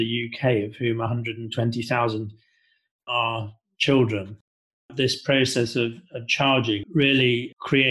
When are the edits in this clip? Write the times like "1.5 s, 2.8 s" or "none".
4.5 s, 6.8 s